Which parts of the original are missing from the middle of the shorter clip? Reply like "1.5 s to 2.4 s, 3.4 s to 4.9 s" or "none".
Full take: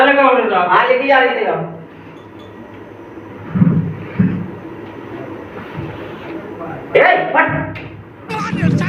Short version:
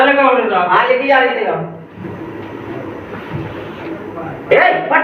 2.0 s to 4.5 s